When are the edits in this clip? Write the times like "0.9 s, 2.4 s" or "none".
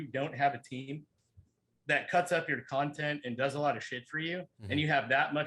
none